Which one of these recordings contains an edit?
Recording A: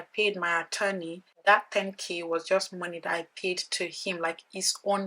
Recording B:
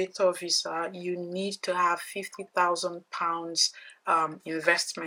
A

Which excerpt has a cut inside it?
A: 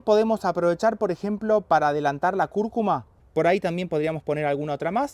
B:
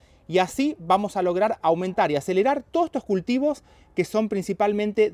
A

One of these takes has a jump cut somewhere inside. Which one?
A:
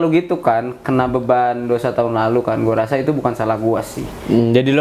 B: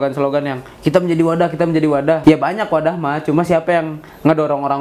B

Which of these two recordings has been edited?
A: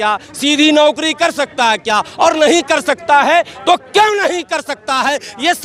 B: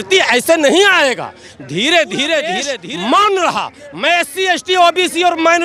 B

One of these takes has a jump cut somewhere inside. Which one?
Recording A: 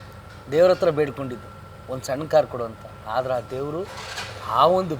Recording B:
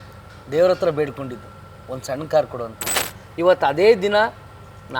B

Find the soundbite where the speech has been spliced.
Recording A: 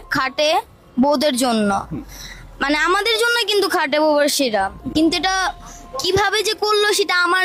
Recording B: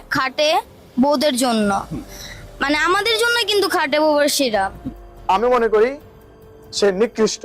B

